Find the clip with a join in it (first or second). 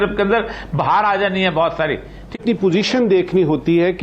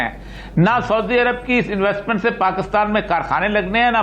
first